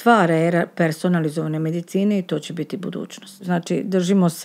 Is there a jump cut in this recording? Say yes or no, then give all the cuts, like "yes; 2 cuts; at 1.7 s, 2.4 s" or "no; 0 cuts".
yes; 1 cut; at 3.3 s